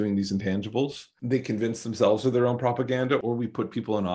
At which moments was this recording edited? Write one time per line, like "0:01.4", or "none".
0:01.1
0:03.2